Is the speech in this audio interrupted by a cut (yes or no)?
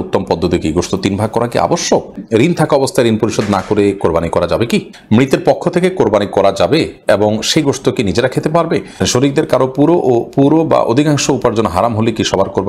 yes